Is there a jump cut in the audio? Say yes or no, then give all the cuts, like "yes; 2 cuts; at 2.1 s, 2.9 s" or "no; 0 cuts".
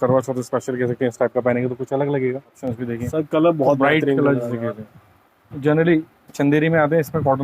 yes; 1 cut; at 2.6 s